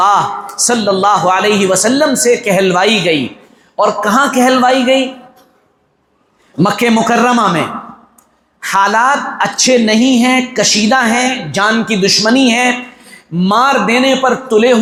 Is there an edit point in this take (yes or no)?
no